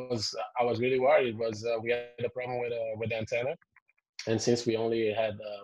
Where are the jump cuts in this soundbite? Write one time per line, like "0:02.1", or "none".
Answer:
none